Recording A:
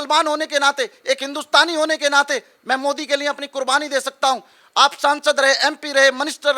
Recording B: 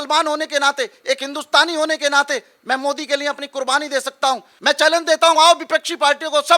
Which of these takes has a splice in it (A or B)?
B